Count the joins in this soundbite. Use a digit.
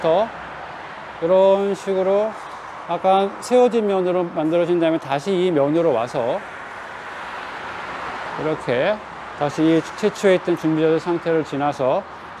0